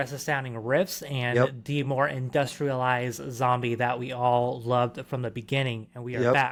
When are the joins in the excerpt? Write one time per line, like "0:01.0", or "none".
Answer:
none